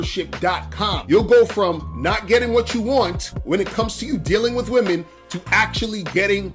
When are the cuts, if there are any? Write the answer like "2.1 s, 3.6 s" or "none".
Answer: 1.0 s